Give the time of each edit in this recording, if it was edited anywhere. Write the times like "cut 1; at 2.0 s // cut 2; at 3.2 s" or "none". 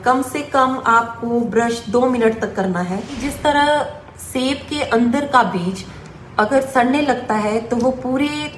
cut 1; at 3.2 s